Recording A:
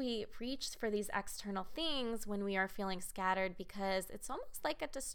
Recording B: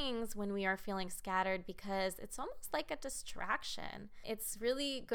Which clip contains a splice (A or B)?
B